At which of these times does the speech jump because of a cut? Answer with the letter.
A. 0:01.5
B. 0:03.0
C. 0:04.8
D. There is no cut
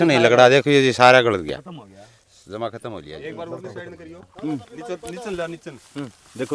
D